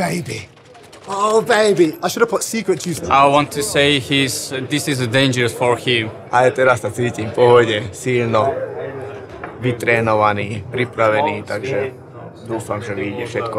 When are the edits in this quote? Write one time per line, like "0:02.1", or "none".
0:02.9
0:06.3